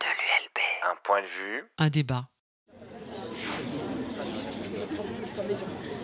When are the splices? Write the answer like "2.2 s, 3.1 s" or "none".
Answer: 2.7 s